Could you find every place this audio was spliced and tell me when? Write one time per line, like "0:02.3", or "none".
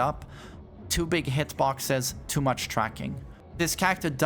none